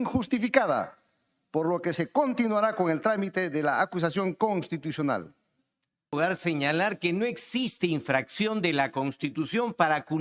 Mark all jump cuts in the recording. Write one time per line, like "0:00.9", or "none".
0:06.1